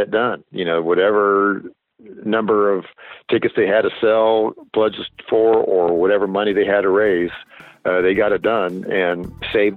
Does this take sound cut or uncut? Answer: uncut